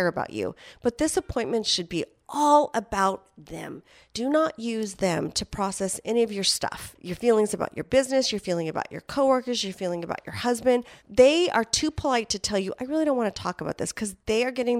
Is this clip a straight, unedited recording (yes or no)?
yes